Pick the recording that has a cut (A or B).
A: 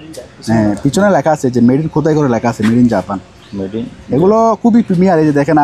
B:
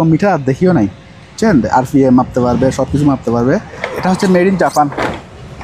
B